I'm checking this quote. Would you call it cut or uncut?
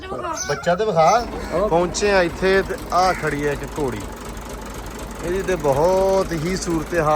cut